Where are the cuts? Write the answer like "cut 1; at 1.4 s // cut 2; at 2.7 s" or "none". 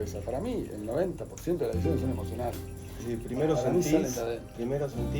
cut 1; at 3.1 s